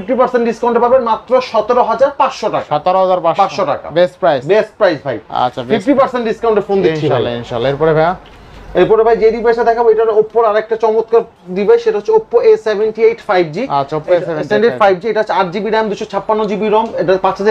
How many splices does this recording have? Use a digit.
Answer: 0